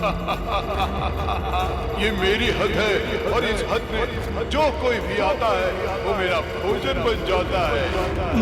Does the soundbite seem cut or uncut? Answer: uncut